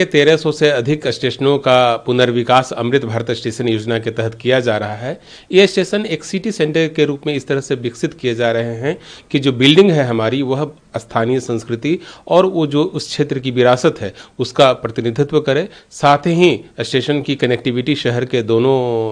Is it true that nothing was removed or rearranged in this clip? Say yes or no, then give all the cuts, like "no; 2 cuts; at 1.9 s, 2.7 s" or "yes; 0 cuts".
yes; 0 cuts